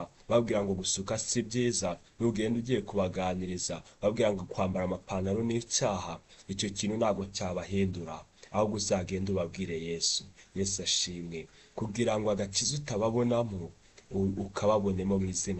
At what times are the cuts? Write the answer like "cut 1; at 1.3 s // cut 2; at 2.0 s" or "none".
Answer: none